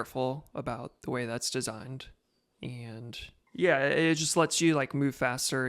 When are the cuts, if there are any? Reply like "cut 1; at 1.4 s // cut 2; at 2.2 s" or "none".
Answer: cut 1; at 3.3 s